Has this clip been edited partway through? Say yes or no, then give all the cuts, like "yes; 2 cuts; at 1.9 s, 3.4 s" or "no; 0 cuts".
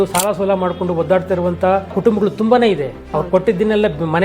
yes; 2 cuts; at 2.0 s, 3.0 s